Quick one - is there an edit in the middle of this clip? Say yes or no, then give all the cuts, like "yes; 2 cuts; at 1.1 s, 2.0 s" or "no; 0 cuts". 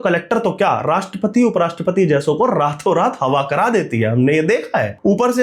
no; 0 cuts